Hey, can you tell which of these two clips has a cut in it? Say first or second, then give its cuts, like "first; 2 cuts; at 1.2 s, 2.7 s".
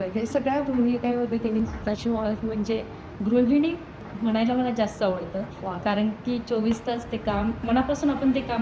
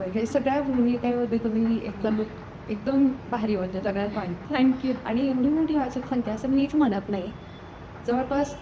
first; 3 cuts; at 1.6 s, 4.0 s, 7.6 s